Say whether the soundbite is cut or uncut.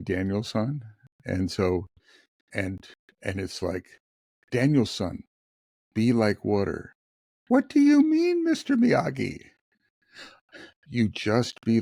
uncut